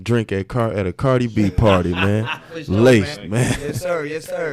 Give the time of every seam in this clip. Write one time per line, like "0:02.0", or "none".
none